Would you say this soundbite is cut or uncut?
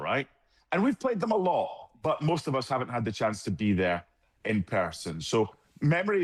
uncut